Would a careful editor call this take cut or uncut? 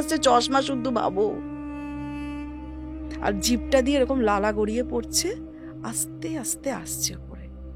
uncut